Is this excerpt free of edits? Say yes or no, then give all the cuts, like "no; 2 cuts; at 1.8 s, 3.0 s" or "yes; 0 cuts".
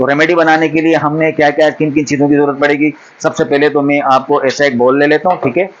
yes; 0 cuts